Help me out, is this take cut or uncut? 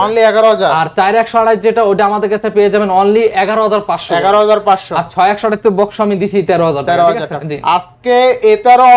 uncut